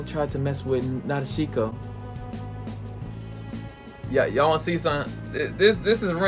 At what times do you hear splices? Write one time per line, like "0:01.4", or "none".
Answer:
none